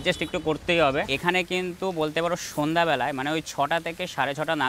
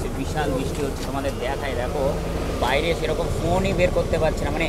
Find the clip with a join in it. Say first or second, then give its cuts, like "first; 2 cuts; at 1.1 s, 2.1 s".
first; 1 cut; at 1.1 s